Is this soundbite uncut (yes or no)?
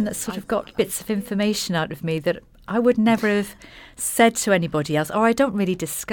yes